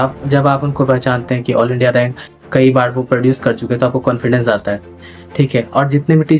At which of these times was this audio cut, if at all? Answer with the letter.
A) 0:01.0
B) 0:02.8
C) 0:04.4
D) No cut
D